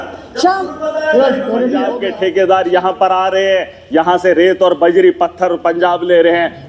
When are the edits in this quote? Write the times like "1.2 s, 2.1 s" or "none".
1.9 s